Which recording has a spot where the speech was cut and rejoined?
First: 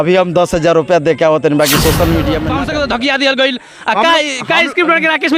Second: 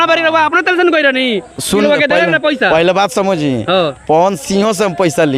first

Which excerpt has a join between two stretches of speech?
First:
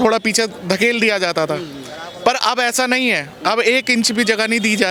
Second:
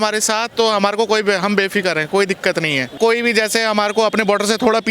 second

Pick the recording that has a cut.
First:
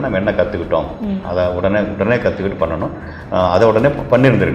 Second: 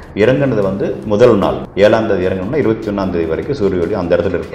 second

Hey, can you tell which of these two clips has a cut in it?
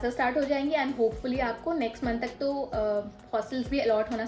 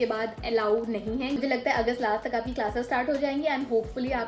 second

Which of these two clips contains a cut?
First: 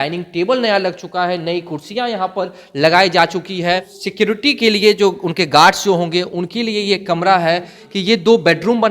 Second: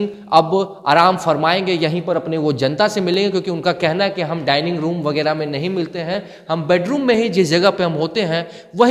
first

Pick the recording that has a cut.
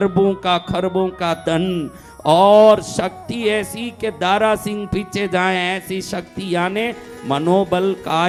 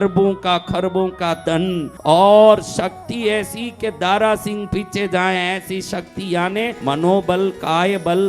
second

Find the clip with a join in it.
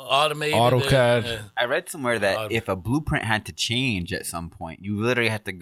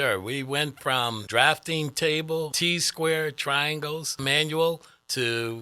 second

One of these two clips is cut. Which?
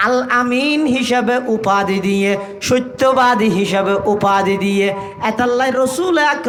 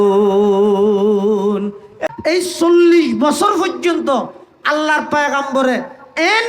second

